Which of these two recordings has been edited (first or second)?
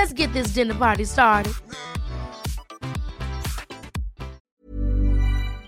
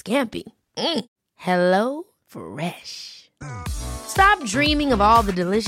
first